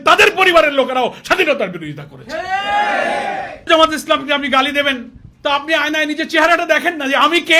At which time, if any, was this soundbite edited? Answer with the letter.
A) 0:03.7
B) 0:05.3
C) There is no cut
A